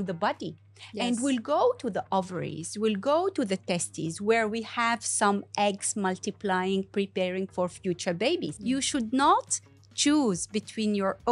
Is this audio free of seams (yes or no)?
no